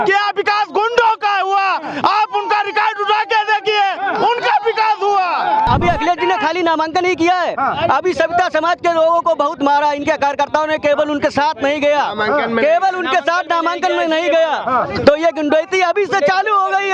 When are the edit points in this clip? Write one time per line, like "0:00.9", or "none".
0:05.7

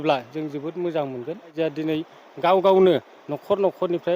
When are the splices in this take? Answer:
0:01.5

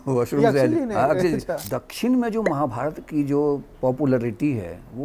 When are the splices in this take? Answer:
0:01.6

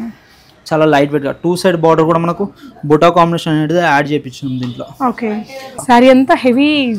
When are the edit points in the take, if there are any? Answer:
0:05.8

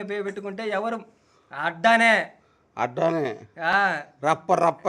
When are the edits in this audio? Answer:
none

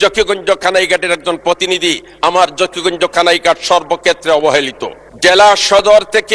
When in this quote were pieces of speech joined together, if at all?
none

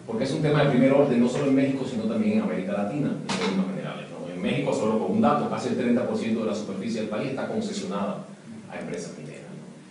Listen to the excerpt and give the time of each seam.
0:08.6

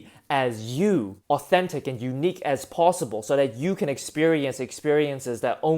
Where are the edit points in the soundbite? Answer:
0:01.2

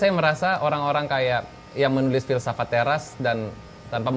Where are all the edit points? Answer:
none

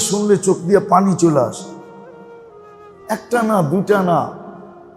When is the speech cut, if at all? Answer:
0:01.8
0:03.1

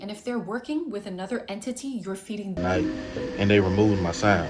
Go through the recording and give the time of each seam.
0:02.6

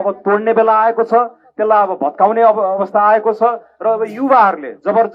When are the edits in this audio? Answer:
none

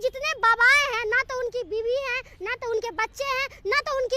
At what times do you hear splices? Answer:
none

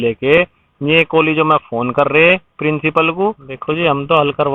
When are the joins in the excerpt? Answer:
0:03.5

